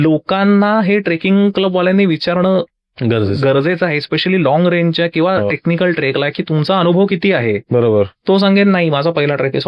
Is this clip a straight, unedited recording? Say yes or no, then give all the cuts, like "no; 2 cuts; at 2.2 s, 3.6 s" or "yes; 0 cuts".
yes; 0 cuts